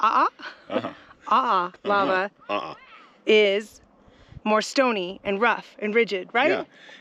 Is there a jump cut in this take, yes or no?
no